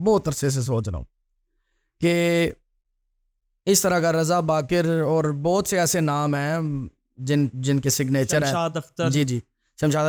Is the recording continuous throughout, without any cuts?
yes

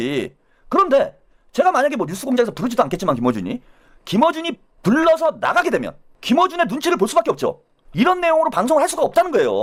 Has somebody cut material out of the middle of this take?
no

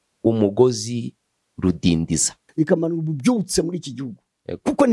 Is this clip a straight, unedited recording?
no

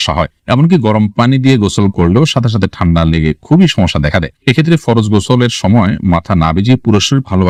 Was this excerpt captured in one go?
yes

